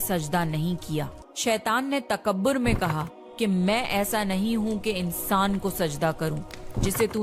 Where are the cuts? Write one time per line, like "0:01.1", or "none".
0:01.2